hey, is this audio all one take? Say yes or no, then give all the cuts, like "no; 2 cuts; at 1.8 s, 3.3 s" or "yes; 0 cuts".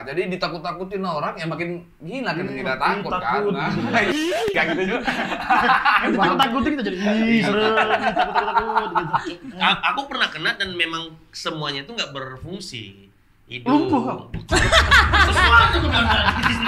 yes; 0 cuts